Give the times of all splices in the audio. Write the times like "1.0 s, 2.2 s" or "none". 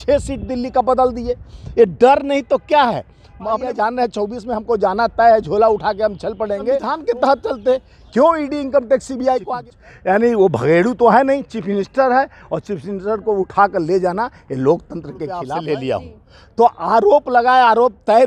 3.6 s, 6.9 s, 9.4 s, 15.5 s